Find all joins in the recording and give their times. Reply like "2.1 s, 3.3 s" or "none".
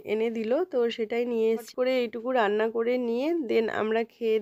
1.7 s